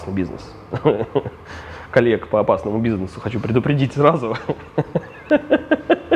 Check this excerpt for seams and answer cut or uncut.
uncut